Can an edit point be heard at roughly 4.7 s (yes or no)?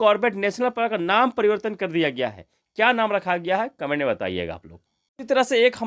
yes